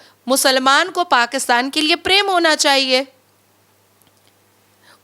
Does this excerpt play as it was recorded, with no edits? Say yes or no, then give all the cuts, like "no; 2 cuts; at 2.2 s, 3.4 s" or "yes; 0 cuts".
yes; 0 cuts